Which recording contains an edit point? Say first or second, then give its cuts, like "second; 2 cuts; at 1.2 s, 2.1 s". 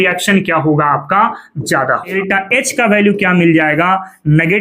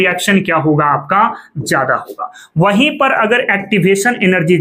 first; 1 cut; at 2.2 s